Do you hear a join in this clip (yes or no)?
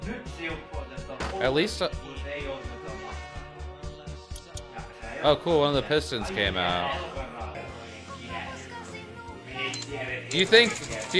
yes